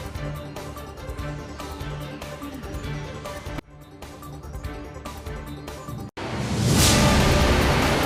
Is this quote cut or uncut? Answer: uncut